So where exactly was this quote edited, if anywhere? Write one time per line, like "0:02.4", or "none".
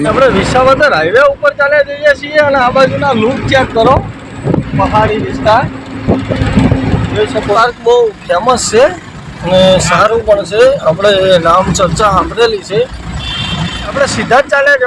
0:07.6
0:13.8